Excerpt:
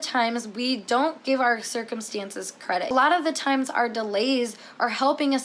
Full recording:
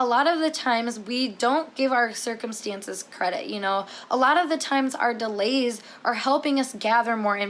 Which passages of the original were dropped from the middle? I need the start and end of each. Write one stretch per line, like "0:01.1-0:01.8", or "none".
0:03.4-0:04.2